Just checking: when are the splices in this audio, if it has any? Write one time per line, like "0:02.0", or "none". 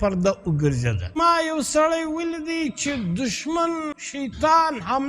0:01.2
0:04.0